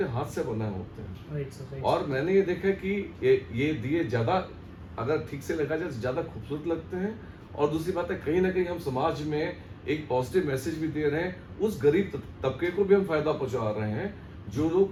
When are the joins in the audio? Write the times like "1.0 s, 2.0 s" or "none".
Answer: none